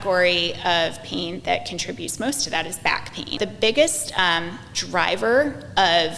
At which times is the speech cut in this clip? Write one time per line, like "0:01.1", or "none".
0:03.4